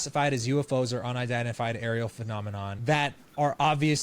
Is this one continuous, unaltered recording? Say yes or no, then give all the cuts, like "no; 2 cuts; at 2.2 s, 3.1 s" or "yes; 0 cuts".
no; 1 cut; at 2.7 s